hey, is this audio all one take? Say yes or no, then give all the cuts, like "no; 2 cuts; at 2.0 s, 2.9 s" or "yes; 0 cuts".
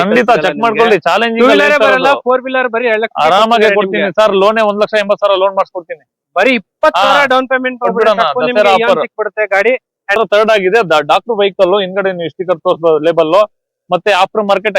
no; 1 cut; at 10.1 s